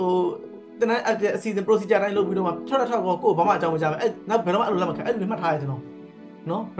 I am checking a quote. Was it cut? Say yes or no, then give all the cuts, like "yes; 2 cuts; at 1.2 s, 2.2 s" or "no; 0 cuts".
no; 0 cuts